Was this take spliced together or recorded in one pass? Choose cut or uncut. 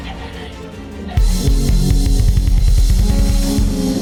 uncut